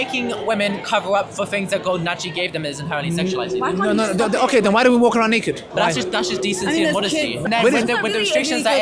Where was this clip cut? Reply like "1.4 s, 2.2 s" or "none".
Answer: 5.6 s, 7.5 s